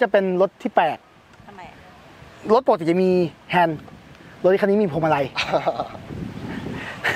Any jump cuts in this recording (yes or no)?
no